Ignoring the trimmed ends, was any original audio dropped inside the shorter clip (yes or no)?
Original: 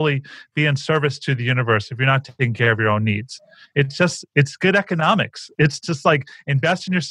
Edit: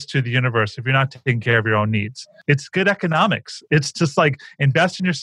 yes